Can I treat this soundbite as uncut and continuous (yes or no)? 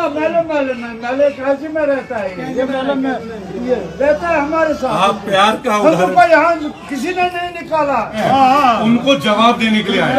no